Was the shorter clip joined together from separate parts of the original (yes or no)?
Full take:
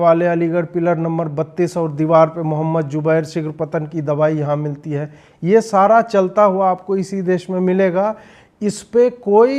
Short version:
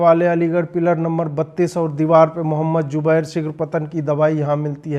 no